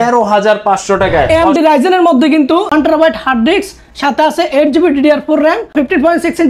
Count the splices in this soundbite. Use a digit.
3